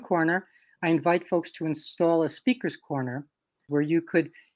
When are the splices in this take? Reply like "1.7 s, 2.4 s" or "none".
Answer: 3.7 s